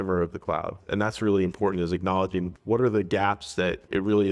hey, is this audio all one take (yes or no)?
no